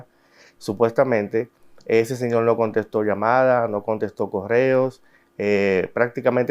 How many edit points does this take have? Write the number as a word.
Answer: zero